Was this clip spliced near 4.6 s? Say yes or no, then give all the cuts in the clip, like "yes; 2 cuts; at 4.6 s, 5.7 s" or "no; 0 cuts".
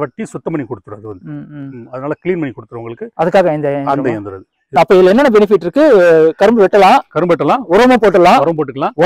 yes; 1 cut; at 4.6 s